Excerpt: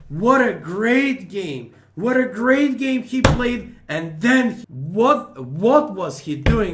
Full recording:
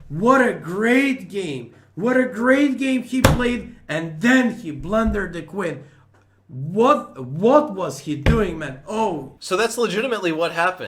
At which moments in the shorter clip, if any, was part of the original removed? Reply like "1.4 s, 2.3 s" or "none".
4.7 s